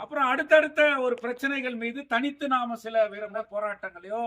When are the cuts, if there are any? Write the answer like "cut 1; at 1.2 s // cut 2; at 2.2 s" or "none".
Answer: cut 1; at 3.3 s

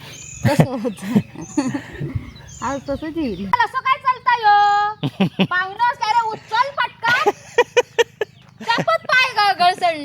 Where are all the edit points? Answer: cut 1; at 3.5 s // cut 2; at 8.5 s

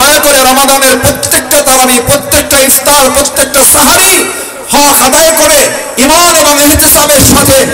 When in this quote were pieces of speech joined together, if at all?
none

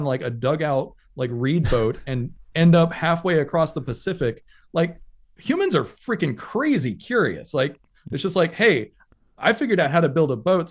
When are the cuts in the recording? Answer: none

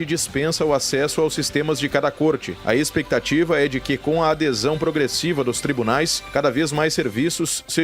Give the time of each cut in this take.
cut 1; at 2.5 s // cut 2; at 6.2 s

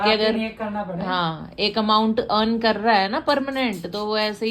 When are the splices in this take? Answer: none

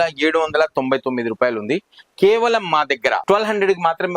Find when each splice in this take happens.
cut 1; at 3.2 s

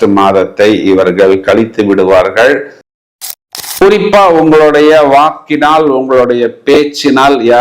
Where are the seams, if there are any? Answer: cut 1; at 3.2 s

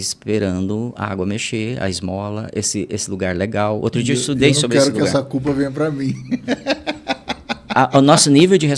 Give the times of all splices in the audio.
none

